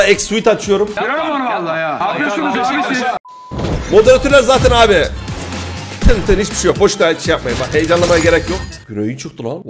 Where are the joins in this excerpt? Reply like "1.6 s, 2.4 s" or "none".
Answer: 1.0 s, 3.7 s

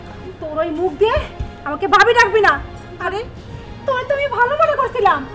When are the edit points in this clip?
none

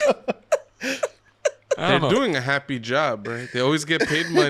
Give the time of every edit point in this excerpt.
none

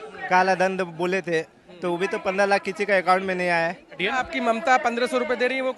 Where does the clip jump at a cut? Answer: 4.0 s

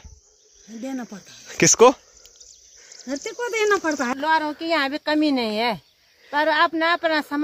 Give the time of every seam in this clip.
4.1 s

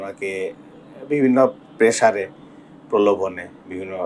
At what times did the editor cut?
none

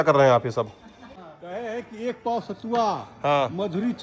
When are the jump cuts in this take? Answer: 1.1 s

